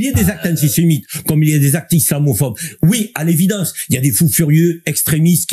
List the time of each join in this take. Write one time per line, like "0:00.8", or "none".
none